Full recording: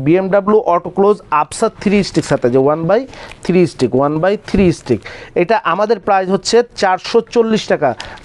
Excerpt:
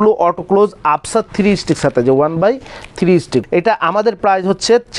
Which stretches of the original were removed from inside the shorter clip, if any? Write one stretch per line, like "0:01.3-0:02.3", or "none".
0:03.9-0:05.3